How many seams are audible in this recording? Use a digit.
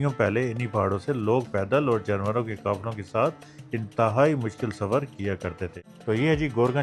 1